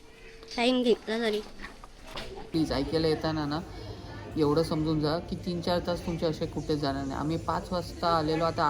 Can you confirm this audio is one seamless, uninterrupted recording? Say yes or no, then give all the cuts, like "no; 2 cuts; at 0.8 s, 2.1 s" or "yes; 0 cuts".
no; 1 cut; at 2.5 s